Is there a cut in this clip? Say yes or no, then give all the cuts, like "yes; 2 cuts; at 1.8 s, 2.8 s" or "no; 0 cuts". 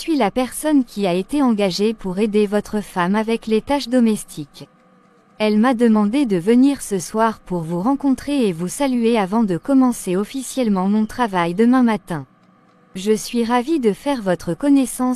no; 0 cuts